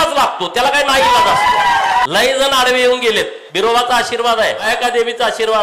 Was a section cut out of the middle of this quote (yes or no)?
yes